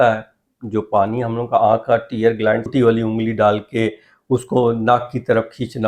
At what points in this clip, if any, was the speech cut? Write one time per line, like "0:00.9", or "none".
0:02.7